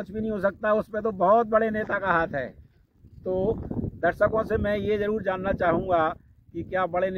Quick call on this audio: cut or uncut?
uncut